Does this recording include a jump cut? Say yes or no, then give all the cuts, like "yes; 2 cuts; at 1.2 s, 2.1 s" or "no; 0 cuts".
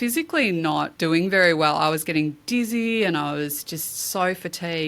yes; 1 cut; at 0.9 s